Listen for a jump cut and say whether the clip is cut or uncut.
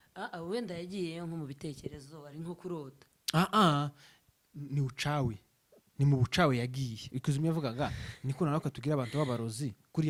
uncut